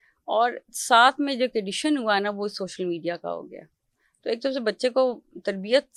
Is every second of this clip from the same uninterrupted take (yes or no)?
yes